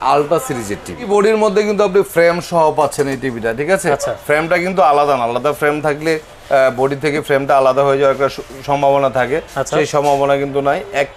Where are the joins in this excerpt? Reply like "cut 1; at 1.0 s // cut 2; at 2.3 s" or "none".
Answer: cut 1; at 1.0 s

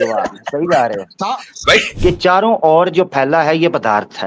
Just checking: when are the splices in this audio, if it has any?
cut 1; at 1.9 s

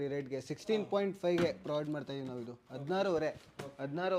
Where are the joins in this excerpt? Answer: none

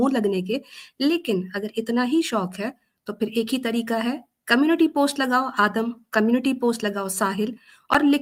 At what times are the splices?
none

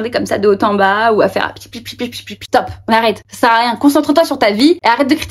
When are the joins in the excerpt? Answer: cut 1; at 2.4 s

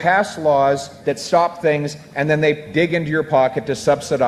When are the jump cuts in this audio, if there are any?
none

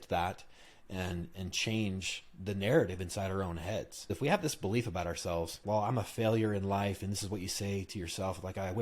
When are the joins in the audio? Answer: cut 1; at 4.1 s // cut 2; at 5.6 s

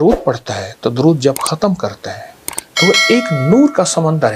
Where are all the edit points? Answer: none

